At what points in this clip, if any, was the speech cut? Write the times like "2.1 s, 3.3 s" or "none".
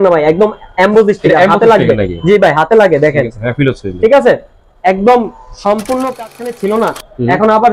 6.3 s